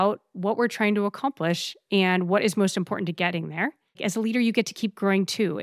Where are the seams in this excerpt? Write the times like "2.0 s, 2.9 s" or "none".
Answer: 3.9 s